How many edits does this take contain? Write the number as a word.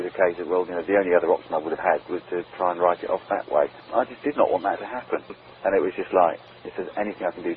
two